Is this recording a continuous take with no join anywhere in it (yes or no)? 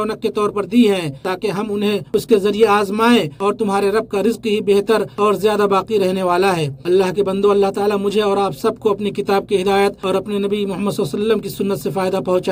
yes